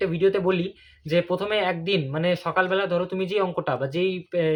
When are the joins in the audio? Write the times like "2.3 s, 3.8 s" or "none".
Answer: none